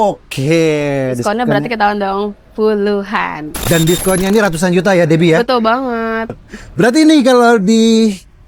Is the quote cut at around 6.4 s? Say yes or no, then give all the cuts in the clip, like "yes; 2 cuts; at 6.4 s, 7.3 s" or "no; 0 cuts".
no; 1 cut; at 3.5 s